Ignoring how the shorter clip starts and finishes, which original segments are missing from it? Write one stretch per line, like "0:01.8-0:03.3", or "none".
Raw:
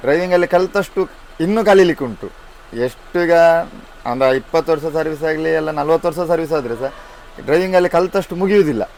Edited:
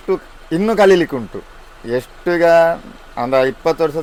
none